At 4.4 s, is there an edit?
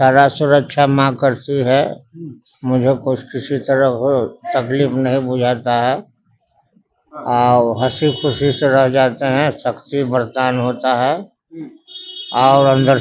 no; 0 cuts

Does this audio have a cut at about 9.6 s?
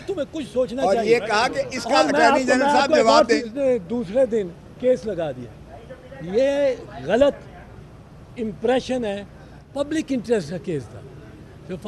yes; 2 cuts; at 3.4 s, 9.6 s

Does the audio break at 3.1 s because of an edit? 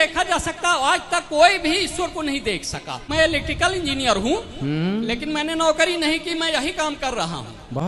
yes; 1 cut; at 3.1 s

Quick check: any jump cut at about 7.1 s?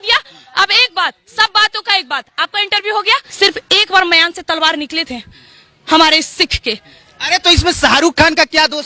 no; 1 cut; at 3.3 s

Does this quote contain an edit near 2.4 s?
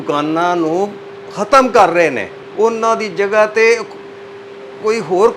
yes; 1 cut; at 2.4 s

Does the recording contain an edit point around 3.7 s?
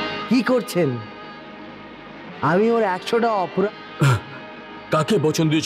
yes; 1 cut; at 3.7 s

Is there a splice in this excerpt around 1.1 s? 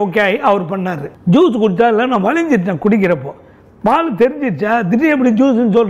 yes; 1 cut; at 1.1 s

